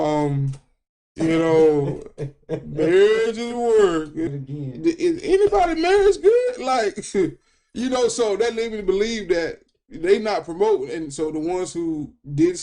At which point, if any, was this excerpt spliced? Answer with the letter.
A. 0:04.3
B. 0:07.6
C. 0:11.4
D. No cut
A